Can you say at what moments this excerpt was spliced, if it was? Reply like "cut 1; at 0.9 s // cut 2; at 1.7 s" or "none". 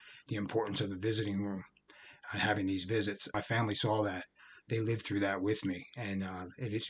cut 1; at 3.3 s